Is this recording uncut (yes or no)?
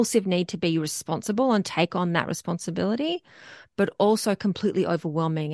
yes